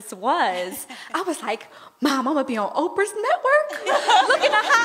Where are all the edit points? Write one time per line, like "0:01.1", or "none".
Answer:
none